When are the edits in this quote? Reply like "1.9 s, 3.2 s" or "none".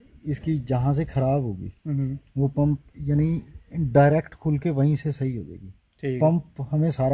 none